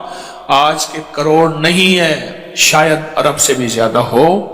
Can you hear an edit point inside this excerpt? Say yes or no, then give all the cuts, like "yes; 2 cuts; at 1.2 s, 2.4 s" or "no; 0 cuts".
yes; 1 cut; at 2.3 s